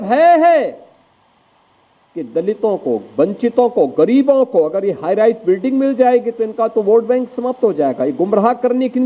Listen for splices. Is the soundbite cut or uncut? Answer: uncut